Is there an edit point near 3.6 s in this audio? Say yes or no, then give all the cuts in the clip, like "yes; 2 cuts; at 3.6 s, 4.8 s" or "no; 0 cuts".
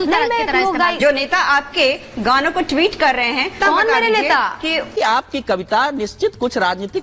yes; 3 cuts; at 1.0 s, 3.6 s, 4.9 s